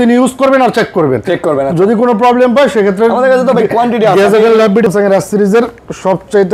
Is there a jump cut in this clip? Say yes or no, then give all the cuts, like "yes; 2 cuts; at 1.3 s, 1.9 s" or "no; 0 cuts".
yes; 1 cut; at 4.9 s